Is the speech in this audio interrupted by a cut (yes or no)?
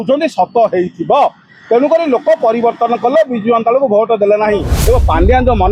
yes